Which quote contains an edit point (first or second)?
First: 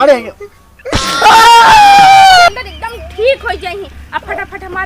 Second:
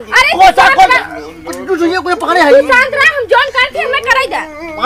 first